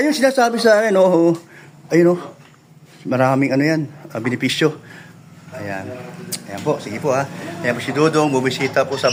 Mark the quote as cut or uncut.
uncut